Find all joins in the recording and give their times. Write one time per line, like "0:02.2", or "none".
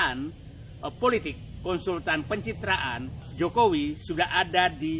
0:03.2